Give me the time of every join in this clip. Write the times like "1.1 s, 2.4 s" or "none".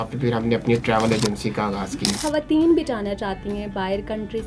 2.2 s